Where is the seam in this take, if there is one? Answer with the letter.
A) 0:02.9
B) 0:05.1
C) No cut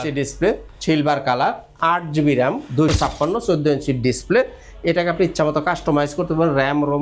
A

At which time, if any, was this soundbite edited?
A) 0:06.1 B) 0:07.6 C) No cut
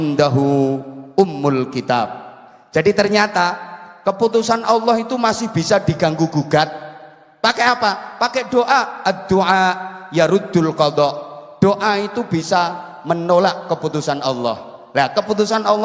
C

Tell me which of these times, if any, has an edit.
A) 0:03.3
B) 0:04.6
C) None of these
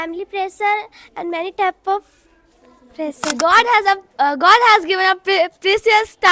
A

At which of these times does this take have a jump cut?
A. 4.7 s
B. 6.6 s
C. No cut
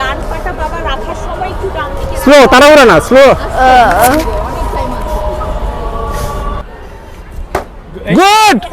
B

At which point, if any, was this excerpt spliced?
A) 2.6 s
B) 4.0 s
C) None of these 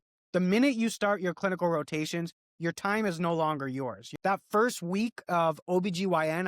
B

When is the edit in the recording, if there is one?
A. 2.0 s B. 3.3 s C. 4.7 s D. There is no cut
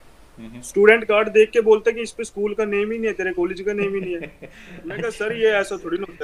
D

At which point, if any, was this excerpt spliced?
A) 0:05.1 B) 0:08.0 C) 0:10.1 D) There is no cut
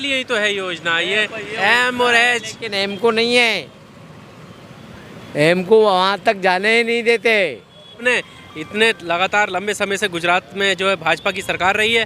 B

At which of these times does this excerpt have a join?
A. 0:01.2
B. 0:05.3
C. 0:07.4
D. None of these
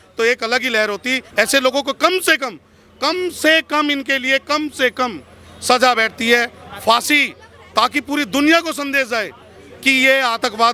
A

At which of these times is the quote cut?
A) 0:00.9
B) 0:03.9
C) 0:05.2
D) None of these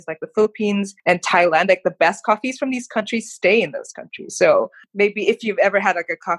A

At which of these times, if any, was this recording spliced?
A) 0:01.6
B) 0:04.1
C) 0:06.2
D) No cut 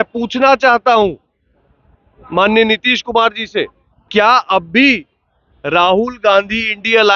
B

